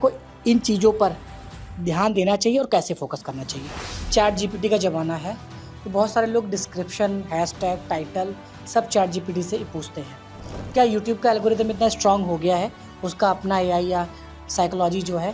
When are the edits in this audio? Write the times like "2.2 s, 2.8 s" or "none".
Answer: 4.0 s